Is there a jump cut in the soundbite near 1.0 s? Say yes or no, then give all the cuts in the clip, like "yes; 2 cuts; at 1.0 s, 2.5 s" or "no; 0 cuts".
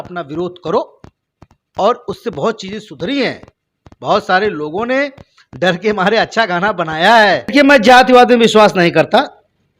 no; 1 cut; at 7.5 s